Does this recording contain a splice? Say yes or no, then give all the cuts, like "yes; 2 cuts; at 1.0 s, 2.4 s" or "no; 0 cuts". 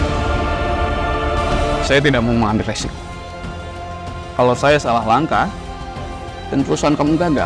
yes; 1 cut; at 1.8 s